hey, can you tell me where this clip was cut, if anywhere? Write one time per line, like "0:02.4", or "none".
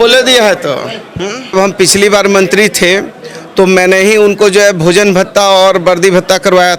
0:01.5